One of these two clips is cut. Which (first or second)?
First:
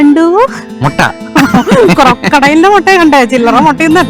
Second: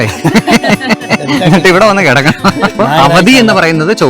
second